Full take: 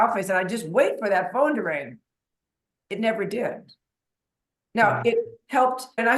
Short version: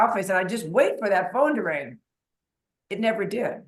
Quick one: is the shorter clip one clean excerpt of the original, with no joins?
yes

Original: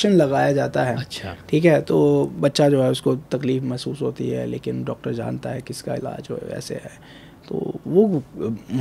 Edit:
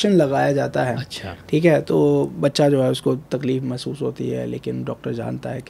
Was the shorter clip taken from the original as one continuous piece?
yes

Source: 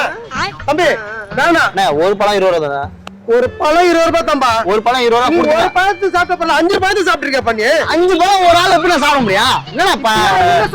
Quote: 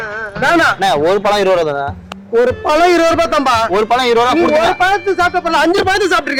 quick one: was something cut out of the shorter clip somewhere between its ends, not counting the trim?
no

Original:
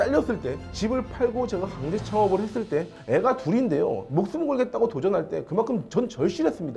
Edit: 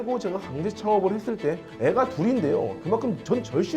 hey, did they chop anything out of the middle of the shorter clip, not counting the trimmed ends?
yes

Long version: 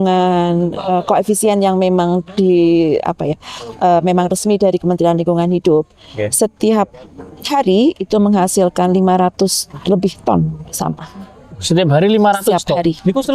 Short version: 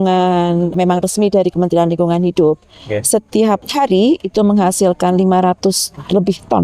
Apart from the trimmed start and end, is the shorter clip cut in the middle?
yes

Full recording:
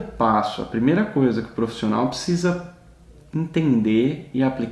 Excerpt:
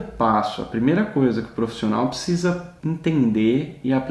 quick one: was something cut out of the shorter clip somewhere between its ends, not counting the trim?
yes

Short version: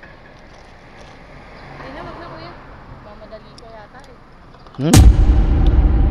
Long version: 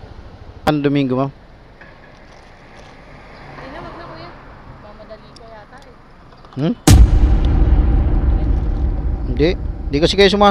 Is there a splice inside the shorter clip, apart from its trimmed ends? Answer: yes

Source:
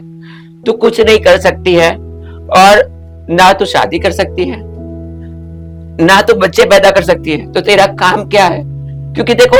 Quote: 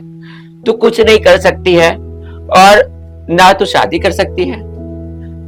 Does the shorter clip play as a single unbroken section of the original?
yes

